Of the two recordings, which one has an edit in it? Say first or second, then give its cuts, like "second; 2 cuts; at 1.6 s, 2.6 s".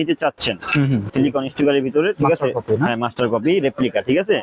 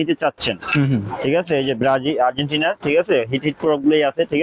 first; 1 cut; at 1.1 s